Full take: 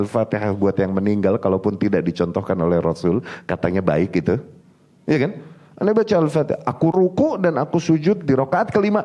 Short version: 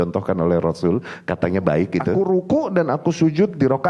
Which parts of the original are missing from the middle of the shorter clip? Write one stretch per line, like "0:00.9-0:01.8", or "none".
0:04.5-0:06.9